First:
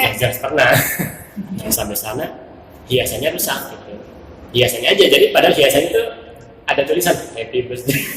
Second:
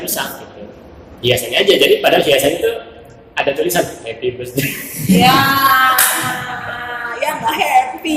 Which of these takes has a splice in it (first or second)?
first